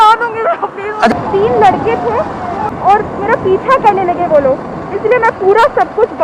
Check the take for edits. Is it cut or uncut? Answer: cut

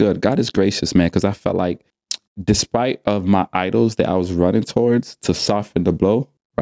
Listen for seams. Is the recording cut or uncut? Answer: cut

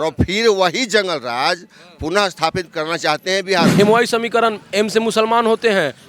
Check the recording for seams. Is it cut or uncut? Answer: cut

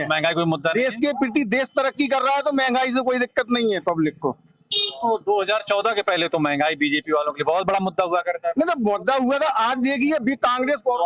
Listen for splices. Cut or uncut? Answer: uncut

